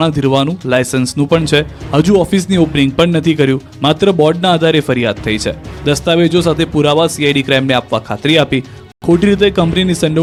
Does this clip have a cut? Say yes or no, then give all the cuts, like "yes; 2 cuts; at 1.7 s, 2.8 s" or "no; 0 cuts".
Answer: no; 0 cuts